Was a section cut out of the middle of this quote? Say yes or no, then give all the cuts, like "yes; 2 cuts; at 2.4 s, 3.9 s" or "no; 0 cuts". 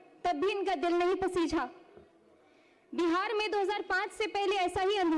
no; 0 cuts